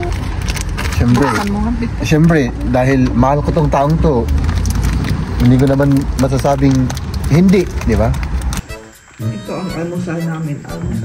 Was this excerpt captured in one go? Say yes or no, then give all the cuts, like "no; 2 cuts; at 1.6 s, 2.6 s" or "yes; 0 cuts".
no; 1 cut; at 8.6 s